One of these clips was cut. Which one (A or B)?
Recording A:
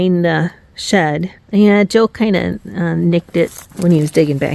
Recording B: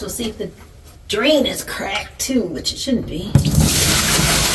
A